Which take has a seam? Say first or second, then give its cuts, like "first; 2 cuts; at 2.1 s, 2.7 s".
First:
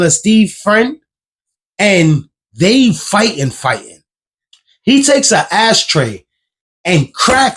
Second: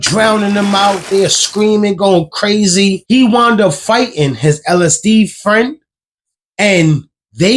second; 1 cut; at 3.0 s